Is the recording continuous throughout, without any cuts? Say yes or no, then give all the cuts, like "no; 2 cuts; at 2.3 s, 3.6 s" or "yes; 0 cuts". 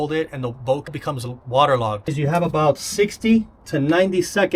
no; 3 cuts; at 1.0 s, 2.1 s, 3.6 s